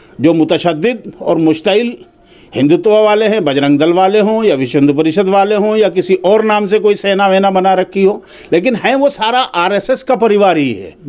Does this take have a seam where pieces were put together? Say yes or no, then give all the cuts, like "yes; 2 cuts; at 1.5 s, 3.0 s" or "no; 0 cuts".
no; 0 cuts